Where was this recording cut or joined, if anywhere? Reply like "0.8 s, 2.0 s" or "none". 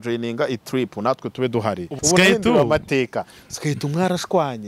1.9 s

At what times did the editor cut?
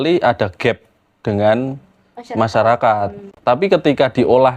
3.3 s

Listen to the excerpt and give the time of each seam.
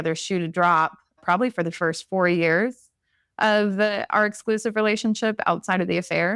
1.2 s

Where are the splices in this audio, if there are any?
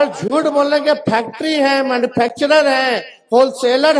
none

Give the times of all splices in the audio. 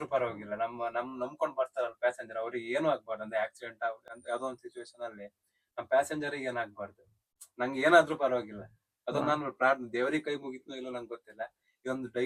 none

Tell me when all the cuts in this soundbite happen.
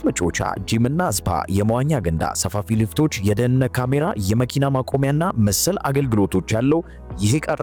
none

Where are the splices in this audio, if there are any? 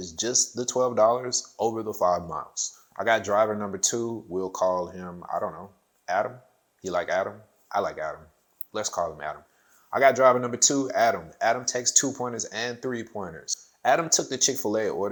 none

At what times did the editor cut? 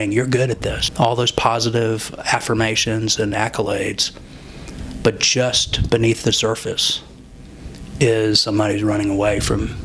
none

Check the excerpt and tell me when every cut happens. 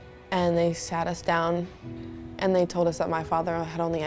none

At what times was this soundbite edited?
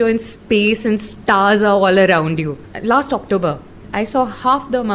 2.7 s, 3.8 s

